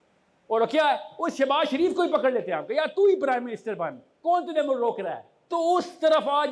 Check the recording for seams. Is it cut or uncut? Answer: cut